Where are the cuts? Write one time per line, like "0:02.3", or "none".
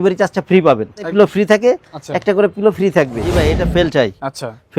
0:01.1
0:03.4